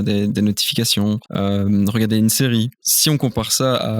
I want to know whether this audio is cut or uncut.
cut